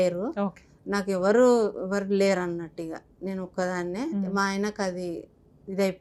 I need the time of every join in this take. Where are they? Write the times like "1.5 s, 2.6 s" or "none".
none